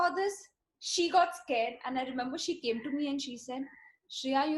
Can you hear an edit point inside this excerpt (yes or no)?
no